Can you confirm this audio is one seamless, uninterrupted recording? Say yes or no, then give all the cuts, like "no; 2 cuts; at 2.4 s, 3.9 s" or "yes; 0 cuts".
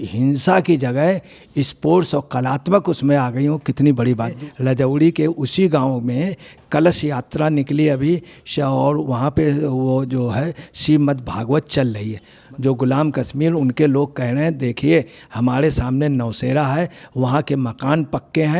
no; 2 cuts; at 4.3 s, 12.4 s